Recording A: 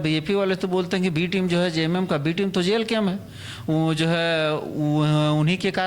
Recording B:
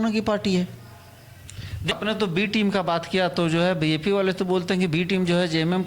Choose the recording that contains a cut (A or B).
B